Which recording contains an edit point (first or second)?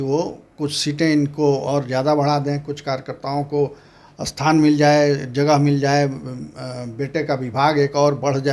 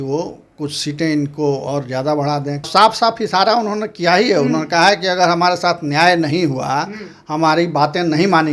second